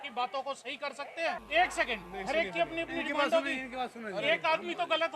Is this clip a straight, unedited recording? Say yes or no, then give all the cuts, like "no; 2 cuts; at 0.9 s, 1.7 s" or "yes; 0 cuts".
no; 1 cut; at 1.4 s